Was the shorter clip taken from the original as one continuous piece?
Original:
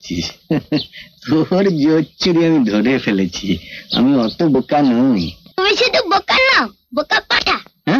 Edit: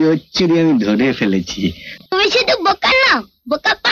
no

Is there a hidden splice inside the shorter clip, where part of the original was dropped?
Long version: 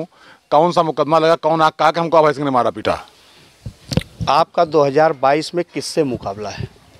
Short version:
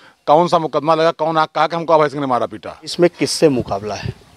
yes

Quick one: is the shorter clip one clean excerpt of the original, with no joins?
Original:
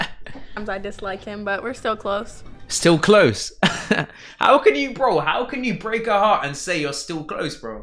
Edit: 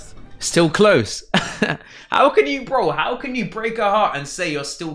yes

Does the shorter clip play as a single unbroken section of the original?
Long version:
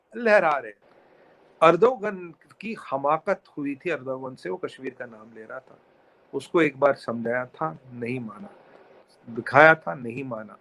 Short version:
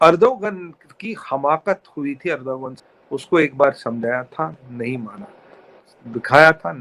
no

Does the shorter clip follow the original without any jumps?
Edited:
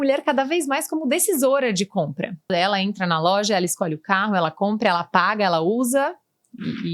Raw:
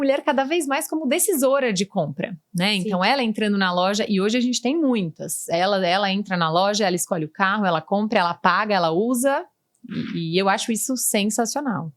no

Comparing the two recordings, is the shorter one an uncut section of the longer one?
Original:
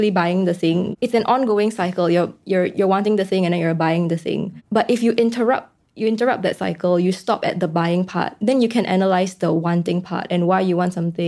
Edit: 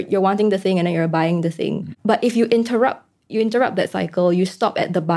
yes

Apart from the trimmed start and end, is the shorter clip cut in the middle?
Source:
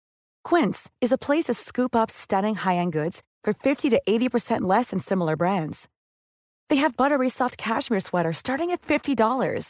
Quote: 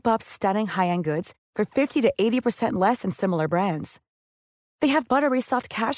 no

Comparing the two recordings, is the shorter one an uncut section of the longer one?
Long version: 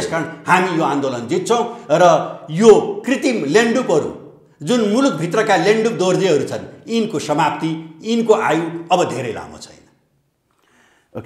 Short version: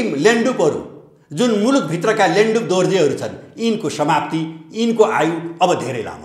yes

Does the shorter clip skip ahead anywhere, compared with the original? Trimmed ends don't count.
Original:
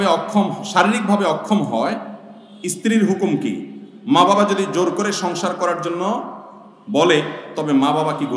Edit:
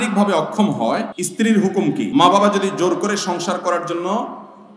yes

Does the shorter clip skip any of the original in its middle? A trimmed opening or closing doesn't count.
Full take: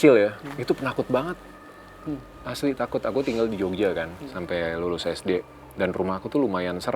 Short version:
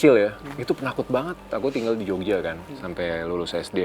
yes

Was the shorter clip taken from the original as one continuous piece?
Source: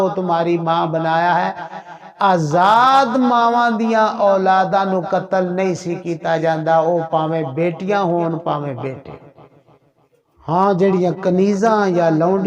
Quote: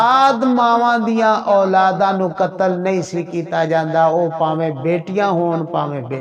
yes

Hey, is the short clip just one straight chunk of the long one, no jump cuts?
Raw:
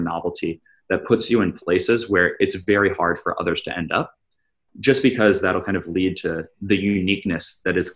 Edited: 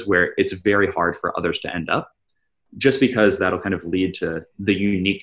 yes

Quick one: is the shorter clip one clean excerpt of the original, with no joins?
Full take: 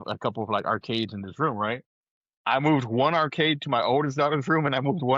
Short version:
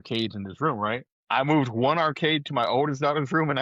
no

